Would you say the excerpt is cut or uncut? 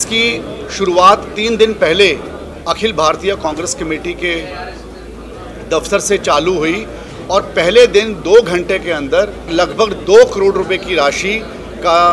cut